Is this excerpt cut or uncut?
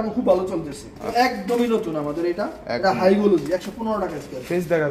cut